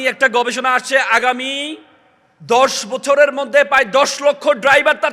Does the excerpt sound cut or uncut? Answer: uncut